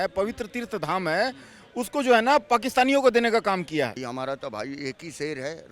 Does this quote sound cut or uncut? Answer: cut